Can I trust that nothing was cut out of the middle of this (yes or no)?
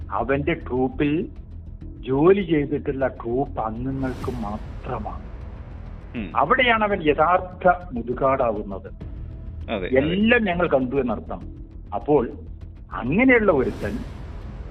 yes